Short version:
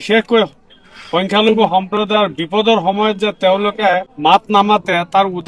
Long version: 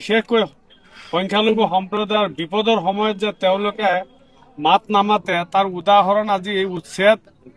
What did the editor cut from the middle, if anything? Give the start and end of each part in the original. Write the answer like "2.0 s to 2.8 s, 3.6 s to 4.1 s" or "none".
4.1 s to 4.5 s